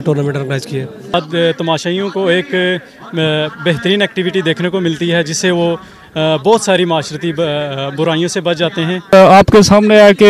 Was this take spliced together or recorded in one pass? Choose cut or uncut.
cut